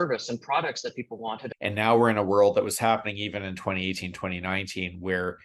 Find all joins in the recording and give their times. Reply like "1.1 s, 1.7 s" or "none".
1.4 s